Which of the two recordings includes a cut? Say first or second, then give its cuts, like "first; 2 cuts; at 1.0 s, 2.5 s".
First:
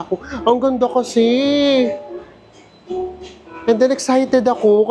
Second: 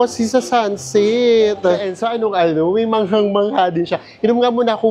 second; 1 cut; at 1.9 s